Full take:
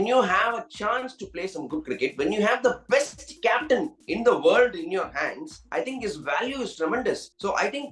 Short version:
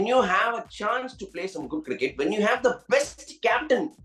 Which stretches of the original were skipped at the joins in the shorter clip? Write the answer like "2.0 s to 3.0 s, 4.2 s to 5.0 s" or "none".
none

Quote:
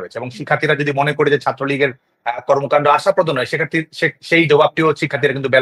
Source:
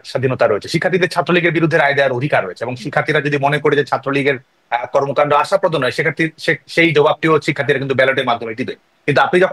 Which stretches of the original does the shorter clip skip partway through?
none

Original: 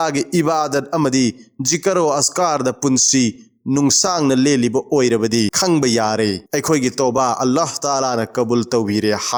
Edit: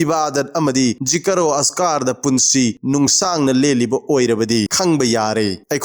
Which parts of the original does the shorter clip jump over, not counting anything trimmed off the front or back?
1.4 s to 1.6 s, 3.4 s to 3.6 s

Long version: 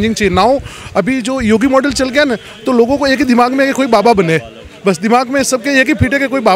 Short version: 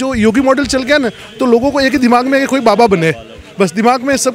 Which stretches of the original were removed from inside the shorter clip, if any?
none

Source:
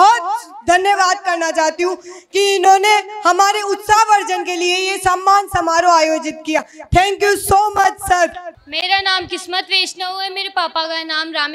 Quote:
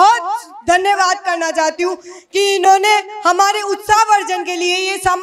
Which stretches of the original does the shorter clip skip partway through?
none

